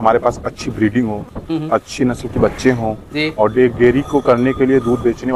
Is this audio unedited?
yes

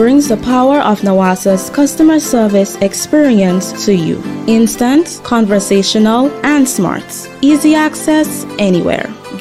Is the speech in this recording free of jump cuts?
yes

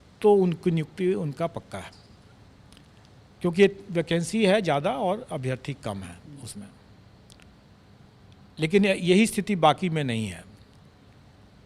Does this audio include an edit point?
no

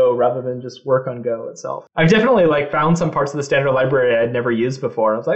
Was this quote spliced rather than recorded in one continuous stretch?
yes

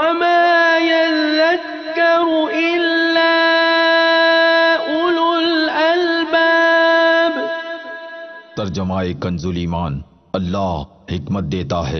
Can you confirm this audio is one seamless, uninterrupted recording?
yes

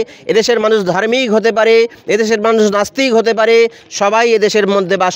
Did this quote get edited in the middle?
no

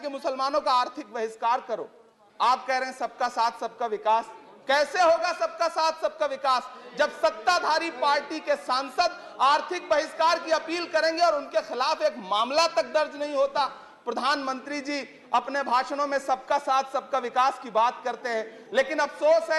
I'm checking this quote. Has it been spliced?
no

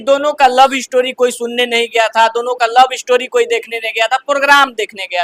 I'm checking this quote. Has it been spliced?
no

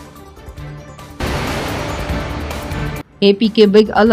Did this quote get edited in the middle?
yes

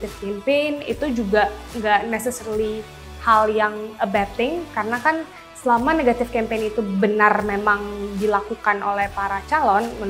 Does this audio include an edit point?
no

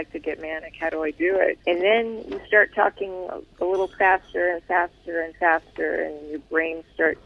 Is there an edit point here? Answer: yes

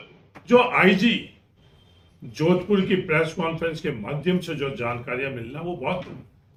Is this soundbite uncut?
yes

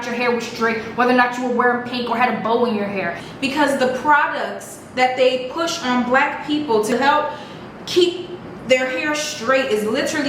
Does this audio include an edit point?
yes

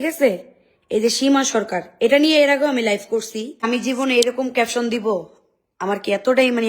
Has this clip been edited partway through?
yes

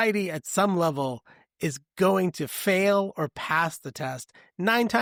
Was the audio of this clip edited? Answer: no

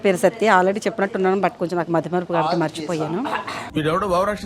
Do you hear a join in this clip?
no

